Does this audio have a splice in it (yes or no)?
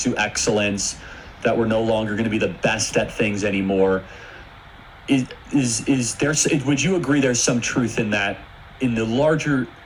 no